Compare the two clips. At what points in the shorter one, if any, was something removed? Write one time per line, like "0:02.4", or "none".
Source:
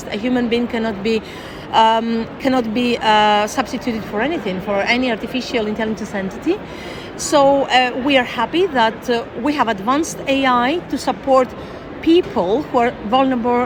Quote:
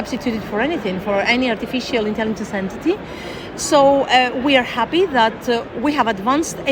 none